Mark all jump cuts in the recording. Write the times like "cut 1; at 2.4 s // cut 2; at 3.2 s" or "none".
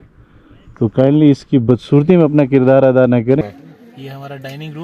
cut 1; at 3.4 s